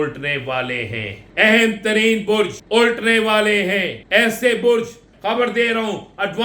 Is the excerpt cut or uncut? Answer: cut